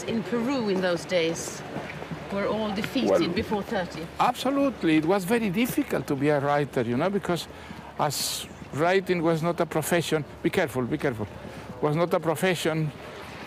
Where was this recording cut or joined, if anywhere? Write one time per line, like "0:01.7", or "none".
none